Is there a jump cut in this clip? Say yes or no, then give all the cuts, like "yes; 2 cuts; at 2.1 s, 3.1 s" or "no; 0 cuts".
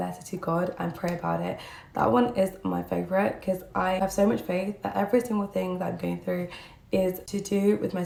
no; 0 cuts